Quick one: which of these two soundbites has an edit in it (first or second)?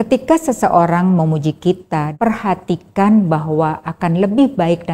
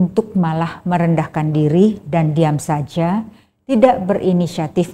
first